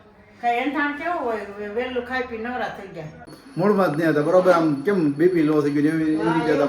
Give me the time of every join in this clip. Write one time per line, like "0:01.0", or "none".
0:03.3